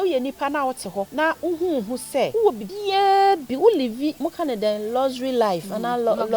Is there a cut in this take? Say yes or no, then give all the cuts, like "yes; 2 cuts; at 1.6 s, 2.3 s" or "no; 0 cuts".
yes; 3 cuts; at 1.1 s, 2.5 s, 4.2 s